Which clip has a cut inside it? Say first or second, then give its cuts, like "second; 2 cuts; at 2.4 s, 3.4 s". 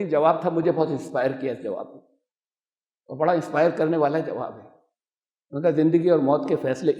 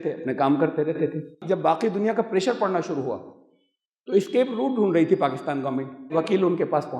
second; 2 cuts; at 1.3 s, 6.1 s